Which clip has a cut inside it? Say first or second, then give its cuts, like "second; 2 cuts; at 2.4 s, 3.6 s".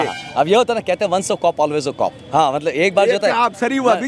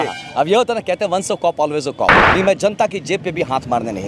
second; 1 cut; at 2.2 s